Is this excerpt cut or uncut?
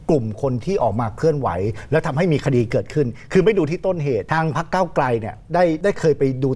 cut